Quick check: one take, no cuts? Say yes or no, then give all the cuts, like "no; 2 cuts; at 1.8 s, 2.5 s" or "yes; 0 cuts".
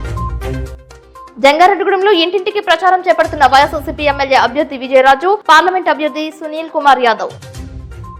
yes; 0 cuts